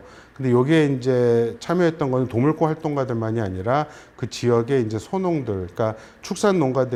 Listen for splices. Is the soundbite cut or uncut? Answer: uncut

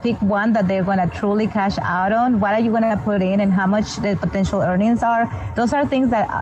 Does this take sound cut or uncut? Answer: uncut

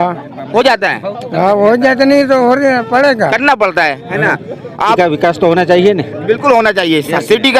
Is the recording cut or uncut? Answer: cut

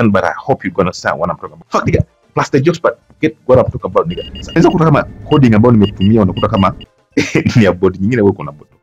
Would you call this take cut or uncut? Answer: cut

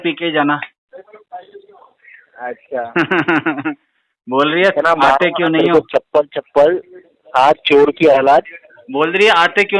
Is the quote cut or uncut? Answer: uncut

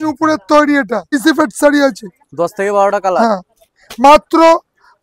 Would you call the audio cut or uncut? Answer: cut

